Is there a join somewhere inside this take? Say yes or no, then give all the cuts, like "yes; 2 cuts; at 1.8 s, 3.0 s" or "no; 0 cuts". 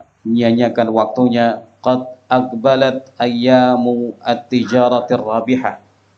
no; 0 cuts